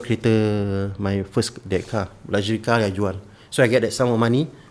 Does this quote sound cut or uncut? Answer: uncut